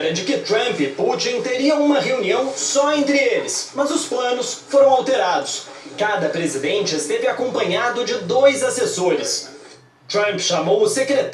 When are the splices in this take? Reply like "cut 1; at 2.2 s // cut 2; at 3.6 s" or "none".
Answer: cut 1; at 6.6 s